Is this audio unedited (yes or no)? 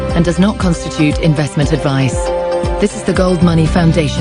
yes